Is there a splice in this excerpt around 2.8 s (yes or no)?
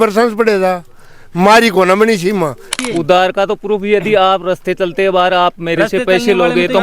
yes